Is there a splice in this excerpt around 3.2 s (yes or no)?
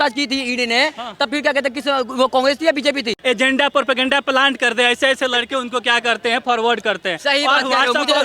yes